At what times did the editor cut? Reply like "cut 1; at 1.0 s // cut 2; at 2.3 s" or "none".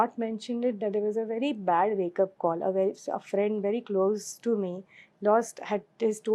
none